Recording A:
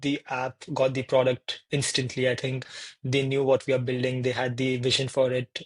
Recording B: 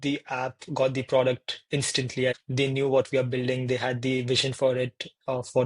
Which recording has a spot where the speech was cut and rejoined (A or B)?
B